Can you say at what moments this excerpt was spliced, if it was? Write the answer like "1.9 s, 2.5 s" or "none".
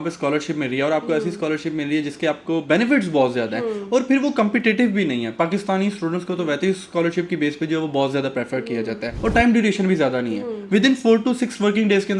9.1 s